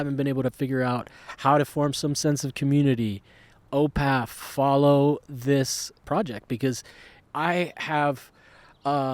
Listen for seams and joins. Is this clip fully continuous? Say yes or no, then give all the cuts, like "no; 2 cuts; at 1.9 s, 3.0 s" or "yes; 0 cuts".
no; 2 cuts; at 6.0 s, 7.1 s